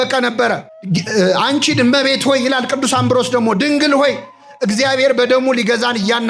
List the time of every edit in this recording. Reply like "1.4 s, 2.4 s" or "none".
1.1 s